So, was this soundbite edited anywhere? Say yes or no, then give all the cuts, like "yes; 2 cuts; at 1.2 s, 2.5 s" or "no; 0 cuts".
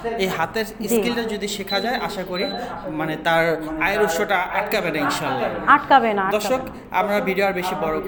no; 0 cuts